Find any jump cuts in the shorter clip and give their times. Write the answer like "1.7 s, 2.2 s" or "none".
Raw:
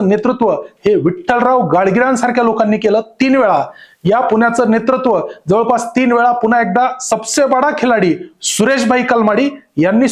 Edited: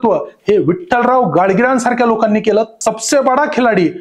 2.7 s